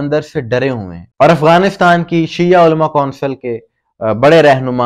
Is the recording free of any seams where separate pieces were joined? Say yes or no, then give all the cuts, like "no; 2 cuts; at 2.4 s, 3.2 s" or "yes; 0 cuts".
no; 1 cut; at 1.1 s